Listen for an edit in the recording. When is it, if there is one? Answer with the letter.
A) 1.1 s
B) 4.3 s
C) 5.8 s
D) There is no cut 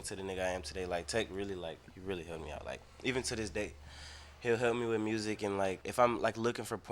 C